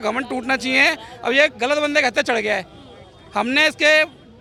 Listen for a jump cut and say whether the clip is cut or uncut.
uncut